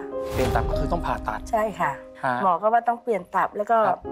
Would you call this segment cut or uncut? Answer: cut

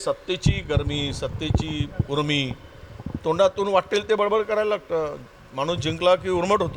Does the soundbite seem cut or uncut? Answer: uncut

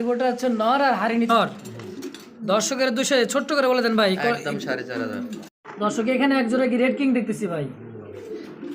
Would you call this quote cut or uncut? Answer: cut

